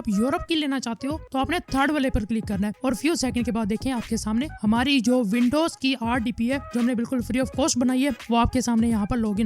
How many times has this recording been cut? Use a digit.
1